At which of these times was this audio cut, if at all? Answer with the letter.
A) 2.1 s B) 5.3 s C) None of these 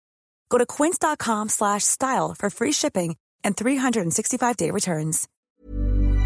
B